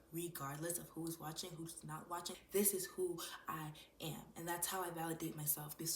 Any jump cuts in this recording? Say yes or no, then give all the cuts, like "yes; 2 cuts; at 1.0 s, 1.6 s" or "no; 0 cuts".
yes; 1 cut; at 2.4 s